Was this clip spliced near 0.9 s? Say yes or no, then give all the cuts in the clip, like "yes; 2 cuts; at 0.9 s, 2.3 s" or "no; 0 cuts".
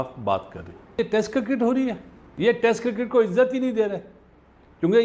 yes; 2 cuts; at 0.9 s, 2.2 s